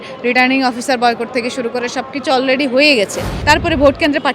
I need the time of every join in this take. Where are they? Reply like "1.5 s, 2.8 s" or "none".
3.3 s